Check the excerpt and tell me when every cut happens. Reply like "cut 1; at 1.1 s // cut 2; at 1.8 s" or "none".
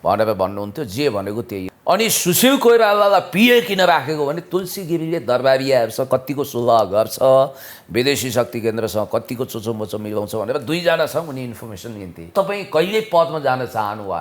cut 1; at 1.5 s // cut 2; at 12.3 s